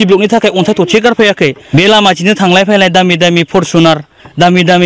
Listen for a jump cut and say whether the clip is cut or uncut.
cut